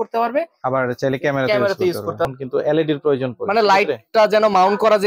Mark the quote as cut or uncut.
cut